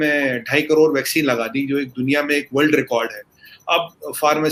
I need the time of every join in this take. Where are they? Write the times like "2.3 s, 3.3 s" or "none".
none